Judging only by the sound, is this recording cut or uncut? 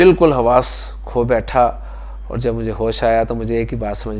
uncut